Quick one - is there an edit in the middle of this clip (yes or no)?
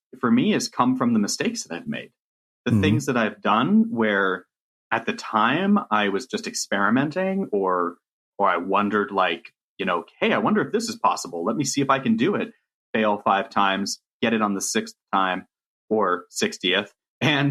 no